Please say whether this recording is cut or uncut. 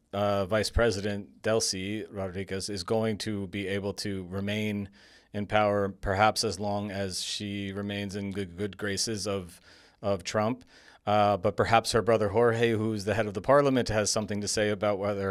uncut